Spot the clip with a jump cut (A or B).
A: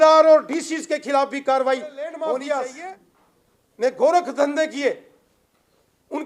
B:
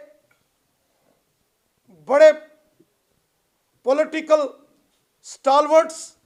A